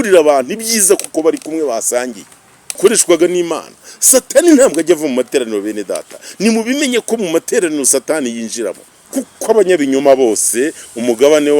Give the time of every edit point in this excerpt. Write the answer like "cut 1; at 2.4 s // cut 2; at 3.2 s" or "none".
cut 1; at 2.8 s // cut 2; at 8.9 s